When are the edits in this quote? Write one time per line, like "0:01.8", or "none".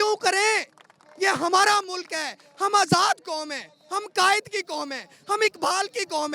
none